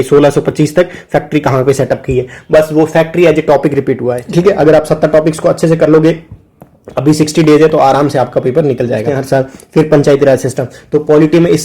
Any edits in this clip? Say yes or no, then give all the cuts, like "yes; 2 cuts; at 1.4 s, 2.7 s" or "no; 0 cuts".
yes; 2 cuts; at 4.1 s, 9.1 s